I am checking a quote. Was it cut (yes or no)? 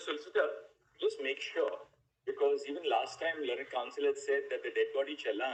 no